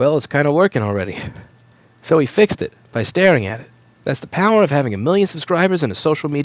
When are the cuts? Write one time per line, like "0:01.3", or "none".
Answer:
none